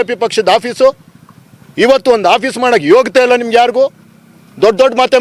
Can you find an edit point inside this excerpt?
no; 0 cuts

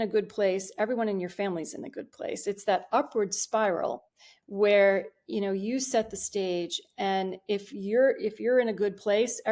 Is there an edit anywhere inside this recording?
no; 0 cuts

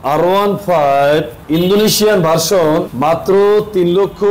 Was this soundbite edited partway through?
no; 0 cuts

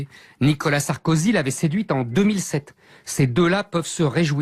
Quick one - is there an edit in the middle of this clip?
yes; 1 cut; at 1.3 s

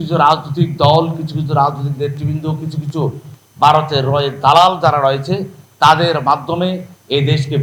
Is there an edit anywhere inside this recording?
no; 0 cuts

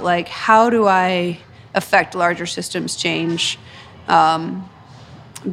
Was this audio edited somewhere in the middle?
no; 0 cuts

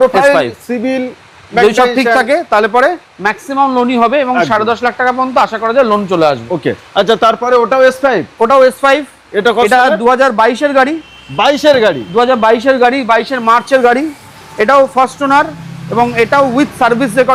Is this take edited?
no; 0 cuts

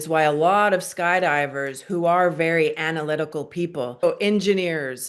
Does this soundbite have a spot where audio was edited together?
yes; 1 cut; at 4.0 s

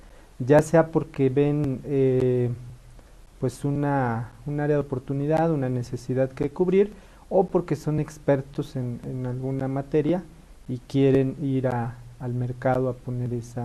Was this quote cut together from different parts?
yes; 1 cut; at 8.5 s

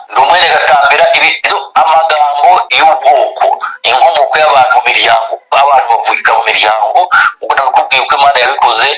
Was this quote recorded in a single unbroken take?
yes; 0 cuts

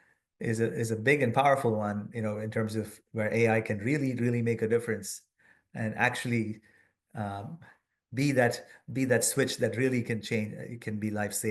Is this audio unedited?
yes; 0 cuts

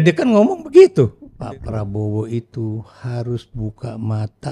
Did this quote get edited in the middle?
yes; 1 cut; at 1.3 s

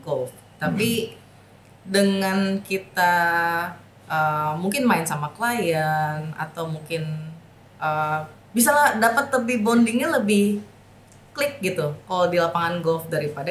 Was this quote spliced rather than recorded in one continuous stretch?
no; 0 cuts

